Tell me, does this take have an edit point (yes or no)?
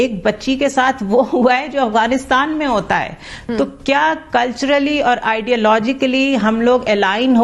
no